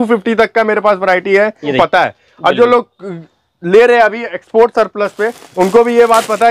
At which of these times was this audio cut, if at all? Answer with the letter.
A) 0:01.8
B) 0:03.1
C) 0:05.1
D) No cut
A